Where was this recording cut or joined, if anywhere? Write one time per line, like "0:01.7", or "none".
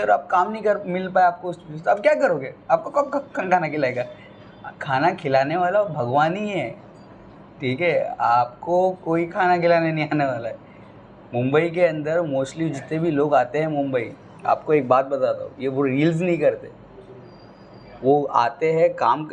none